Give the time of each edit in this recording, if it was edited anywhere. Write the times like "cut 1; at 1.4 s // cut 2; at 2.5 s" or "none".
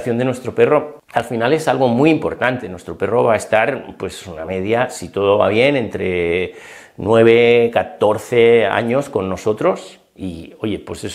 cut 1; at 1.0 s